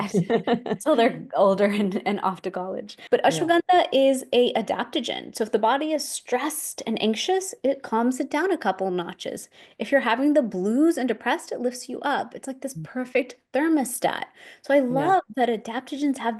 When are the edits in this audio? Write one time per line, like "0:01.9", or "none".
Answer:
0:02.9

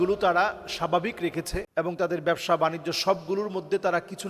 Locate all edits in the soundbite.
0:01.7

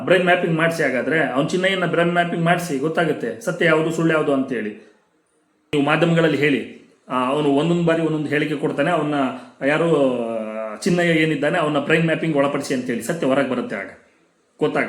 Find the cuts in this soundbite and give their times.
0:05.7

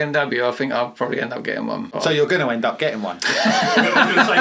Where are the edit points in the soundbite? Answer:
0:01.9

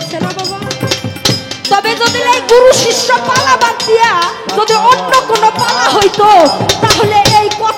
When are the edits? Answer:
0:01.6

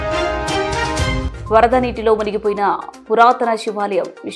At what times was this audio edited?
0:01.2

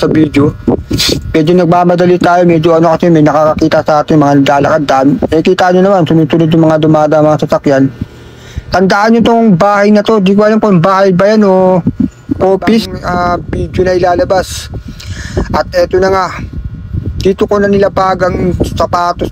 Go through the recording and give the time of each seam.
0:13.0

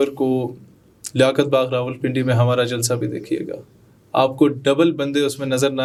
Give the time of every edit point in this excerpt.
none

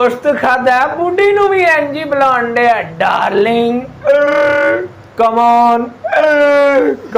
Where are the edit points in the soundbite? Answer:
none

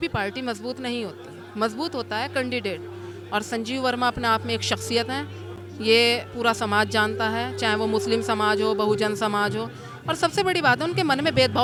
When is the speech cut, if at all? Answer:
none

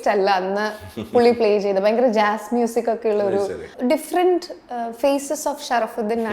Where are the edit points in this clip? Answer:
0:03.6

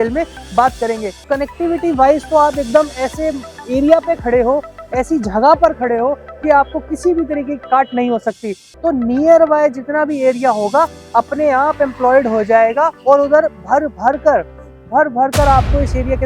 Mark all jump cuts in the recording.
0:01.3
0:08.6

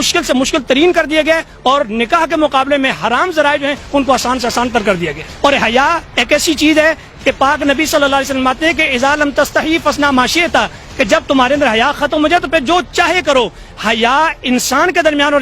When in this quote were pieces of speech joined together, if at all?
0:05.2

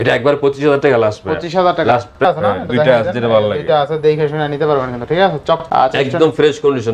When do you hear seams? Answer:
0:02.2
0:05.6

